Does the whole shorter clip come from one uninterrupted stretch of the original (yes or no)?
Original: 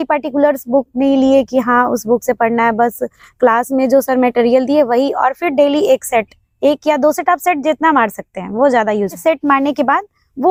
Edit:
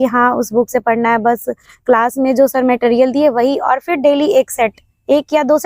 yes